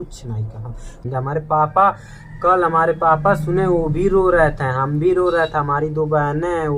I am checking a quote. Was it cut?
yes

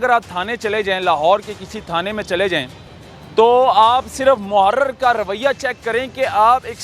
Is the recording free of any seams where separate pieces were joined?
yes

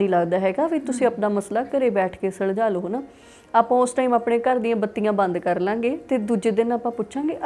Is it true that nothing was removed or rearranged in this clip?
yes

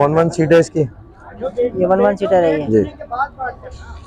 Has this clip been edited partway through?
no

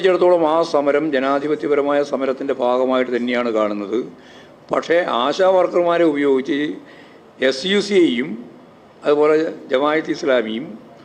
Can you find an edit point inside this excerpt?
no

